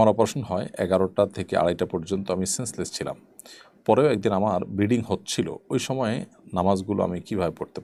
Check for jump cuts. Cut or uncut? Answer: uncut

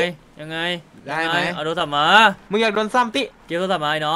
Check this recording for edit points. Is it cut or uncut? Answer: uncut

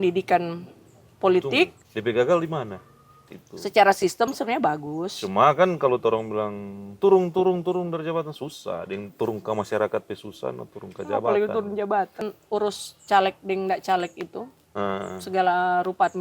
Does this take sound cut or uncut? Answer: cut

